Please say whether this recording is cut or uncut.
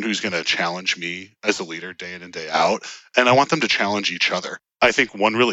cut